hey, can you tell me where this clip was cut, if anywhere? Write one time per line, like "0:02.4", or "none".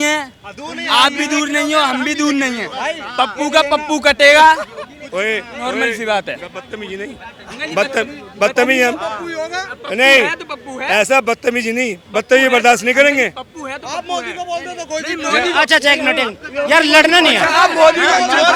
none